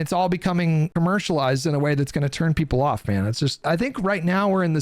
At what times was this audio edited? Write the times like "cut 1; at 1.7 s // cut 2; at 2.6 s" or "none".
cut 1; at 0.9 s // cut 2; at 3.6 s